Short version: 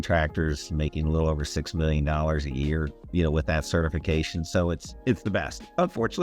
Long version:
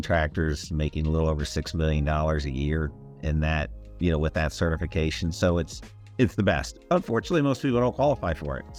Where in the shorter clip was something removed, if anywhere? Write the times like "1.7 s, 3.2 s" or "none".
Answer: 3.0 s, 4.9 s

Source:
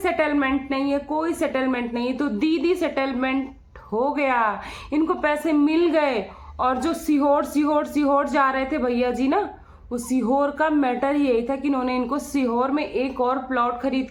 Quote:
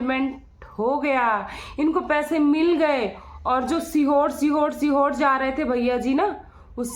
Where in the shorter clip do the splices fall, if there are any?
none

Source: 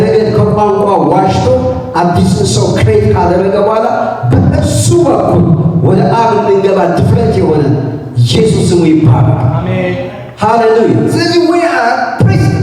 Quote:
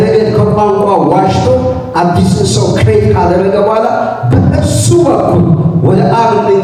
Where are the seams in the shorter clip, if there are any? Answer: none

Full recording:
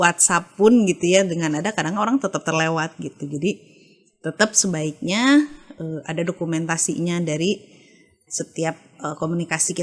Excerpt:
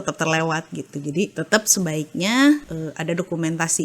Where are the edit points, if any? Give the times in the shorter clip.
1.3 s, 2.7 s

